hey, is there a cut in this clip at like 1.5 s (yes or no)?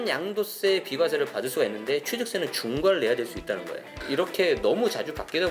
no